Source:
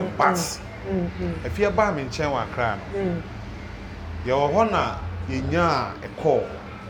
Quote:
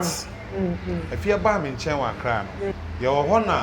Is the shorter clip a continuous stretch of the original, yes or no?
no